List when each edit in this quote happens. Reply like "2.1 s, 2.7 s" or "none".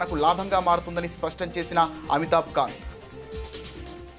2.8 s